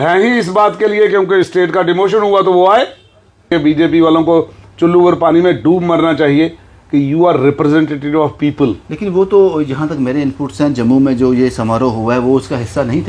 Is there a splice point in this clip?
yes; 1 cut; at 3.5 s

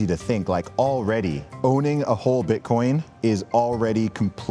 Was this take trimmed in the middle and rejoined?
yes; 2 cuts; at 1.5 s, 3.1 s

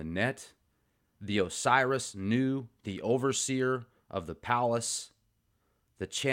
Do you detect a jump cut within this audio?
no; 0 cuts

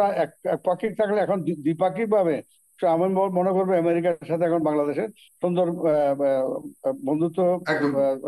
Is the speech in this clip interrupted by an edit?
no; 0 cuts

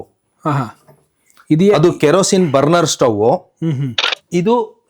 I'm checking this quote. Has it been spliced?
no; 0 cuts

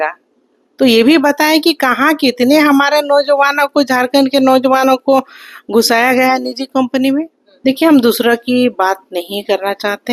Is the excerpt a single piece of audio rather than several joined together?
no; 1 cut; at 7.4 s

